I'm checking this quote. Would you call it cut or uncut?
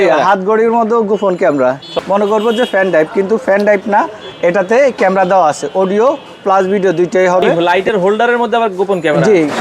cut